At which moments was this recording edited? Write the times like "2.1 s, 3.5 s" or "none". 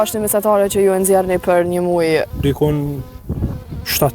2.3 s

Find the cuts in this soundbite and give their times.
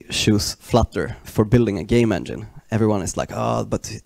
1.2 s

